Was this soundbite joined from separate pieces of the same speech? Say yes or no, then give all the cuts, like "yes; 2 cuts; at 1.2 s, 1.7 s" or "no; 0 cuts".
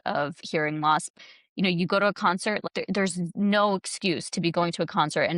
yes; 2 cuts; at 1.1 s, 2.6 s